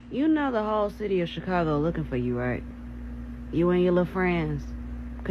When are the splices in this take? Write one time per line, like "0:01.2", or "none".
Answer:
none